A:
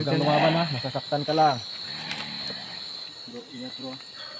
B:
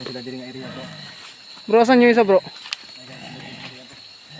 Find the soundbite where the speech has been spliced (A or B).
A